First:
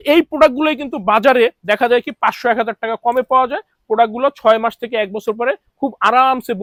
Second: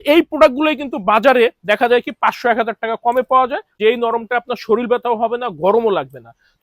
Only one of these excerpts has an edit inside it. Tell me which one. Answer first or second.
second